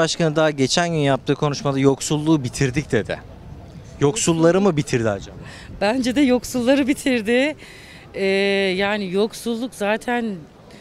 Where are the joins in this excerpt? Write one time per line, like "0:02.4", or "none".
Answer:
none